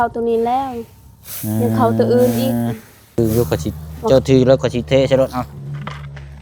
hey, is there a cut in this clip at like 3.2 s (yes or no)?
yes